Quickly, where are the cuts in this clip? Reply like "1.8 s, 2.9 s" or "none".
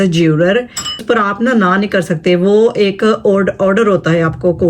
1.0 s